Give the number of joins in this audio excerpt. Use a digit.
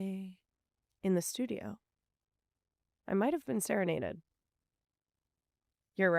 0